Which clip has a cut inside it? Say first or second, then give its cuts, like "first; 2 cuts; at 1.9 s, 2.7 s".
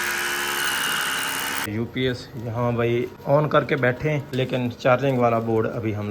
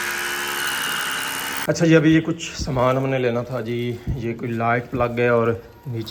first; 3 cuts; at 1.7 s, 3.2 s, 4.3 s